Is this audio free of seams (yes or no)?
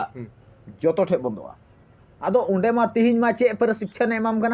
no